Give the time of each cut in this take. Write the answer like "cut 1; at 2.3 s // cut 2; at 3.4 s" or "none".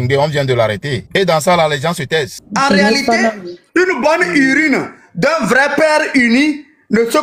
cut 1; at 2.4 s